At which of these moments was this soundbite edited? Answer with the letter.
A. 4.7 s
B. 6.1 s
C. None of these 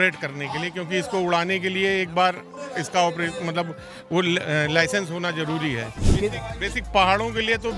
B